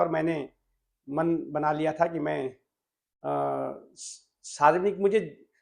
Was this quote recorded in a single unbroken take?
yes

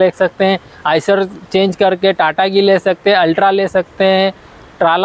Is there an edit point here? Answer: no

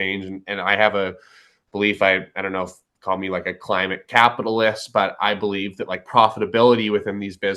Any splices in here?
no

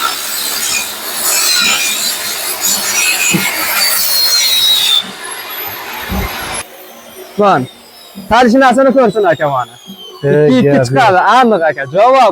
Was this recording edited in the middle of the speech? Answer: no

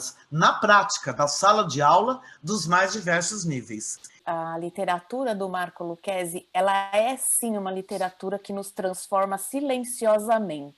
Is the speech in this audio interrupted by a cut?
yes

